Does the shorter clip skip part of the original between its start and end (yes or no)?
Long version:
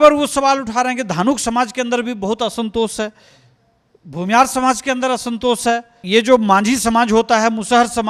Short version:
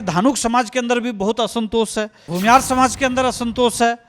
yes